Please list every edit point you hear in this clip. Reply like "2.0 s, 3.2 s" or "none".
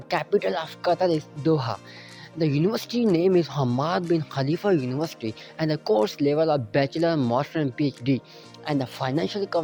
none